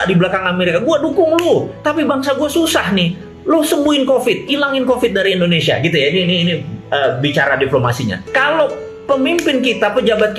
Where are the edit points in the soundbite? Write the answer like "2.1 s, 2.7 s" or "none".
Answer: 8.2 s